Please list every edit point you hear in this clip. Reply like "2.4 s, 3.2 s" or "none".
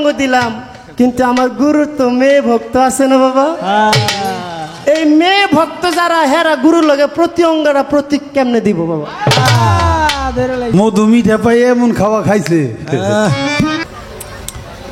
10.7 s, 13.8 s